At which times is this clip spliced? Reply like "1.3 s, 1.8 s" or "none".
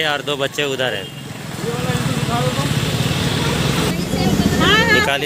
3.9 s